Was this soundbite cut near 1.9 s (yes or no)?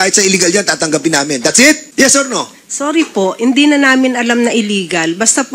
yes